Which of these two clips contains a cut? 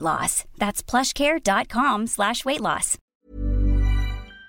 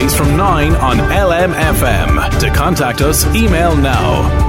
first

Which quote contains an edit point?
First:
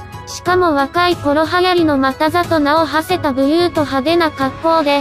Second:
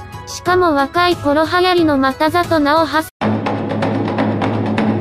first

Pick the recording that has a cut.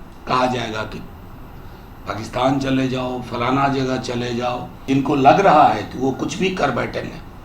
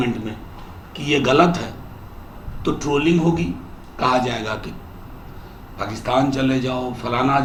first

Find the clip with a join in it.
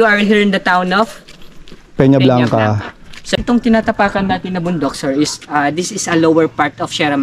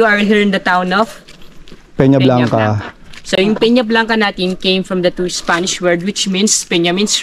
first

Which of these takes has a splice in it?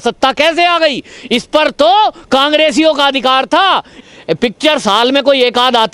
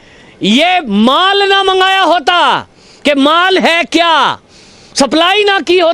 first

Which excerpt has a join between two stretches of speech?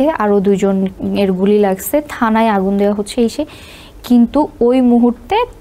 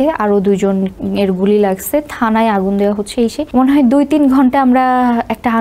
second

